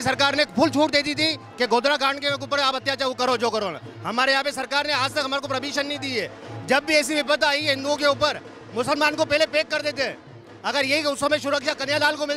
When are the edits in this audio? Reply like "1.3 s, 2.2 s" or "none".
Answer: none